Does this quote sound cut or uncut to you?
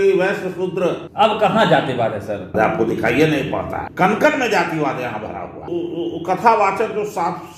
cut